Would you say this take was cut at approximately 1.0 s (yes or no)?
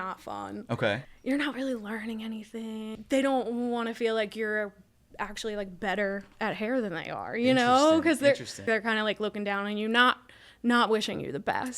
yes